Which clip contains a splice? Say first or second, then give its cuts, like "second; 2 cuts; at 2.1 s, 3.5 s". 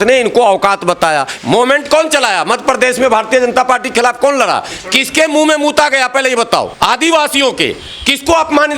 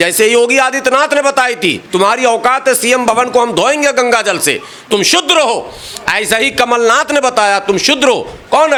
first; 1 cut; at 1.3 s